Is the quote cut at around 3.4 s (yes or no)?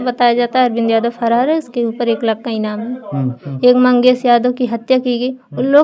yes